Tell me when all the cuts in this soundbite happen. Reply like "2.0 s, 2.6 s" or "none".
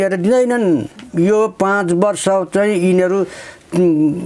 1.0 s